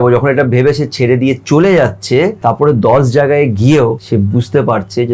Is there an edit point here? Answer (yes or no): yes